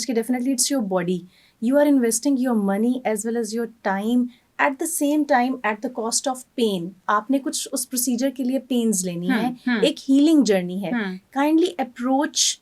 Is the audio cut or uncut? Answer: uncut